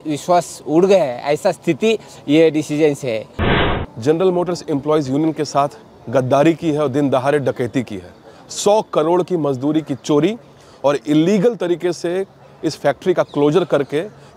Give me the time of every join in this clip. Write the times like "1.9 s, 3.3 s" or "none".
3.4 s